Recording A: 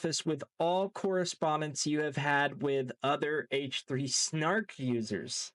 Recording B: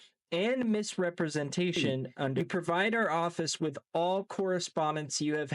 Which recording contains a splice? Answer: B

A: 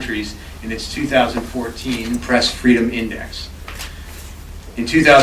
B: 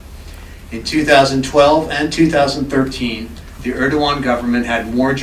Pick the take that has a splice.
A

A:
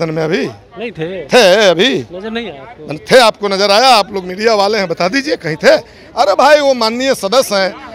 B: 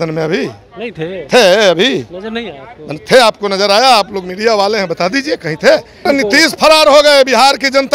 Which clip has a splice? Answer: B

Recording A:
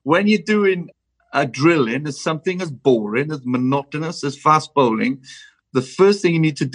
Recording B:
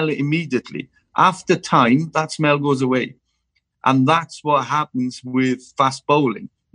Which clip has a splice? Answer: A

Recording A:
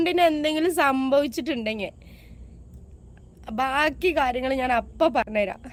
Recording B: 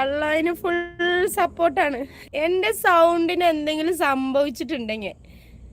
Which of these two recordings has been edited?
B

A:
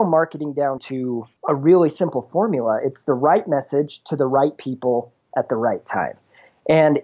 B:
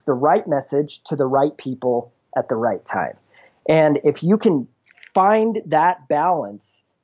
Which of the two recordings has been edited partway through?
A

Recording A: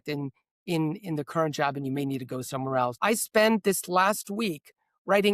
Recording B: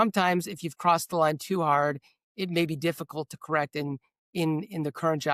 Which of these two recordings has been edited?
A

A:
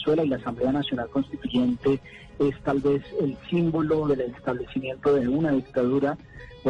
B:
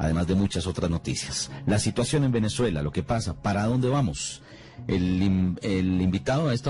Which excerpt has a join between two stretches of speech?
B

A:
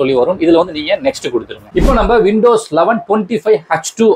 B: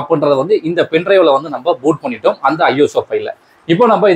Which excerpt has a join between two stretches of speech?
A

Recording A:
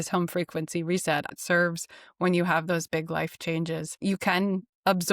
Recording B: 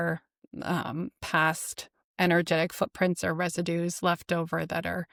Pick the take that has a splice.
A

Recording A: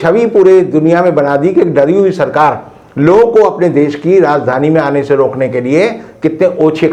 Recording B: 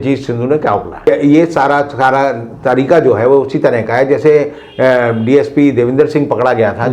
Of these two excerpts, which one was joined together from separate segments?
B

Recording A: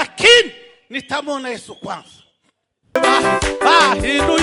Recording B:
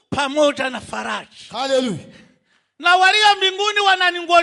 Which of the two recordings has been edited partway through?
A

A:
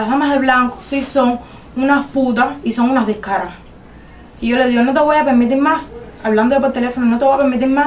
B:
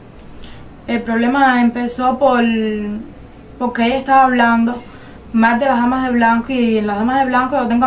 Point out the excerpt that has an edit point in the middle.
B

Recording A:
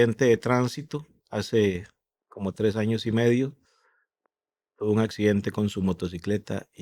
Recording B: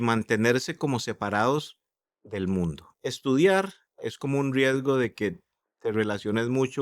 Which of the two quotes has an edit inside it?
B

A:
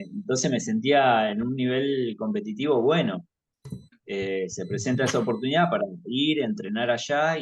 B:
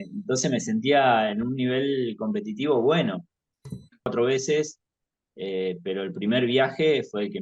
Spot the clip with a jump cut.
B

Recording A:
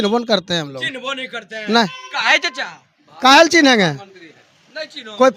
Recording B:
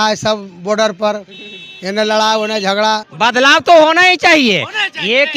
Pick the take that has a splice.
B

